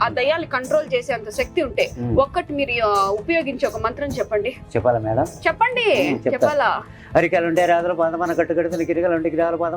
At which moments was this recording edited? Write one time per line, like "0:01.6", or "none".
none